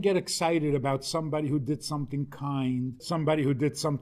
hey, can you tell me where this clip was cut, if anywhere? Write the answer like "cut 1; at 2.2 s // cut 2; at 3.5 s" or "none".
cut 1; at 3.0 s